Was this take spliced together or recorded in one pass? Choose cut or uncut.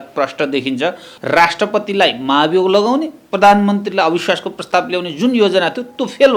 cut